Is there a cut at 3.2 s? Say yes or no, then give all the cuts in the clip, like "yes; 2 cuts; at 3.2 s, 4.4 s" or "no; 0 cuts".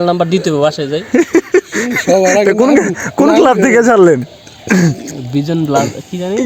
no; 0 cuts